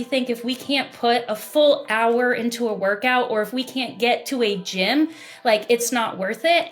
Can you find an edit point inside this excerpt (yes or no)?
no